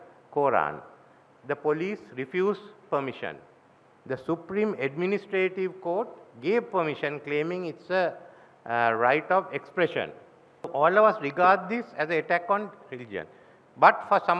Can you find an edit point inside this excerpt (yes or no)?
yes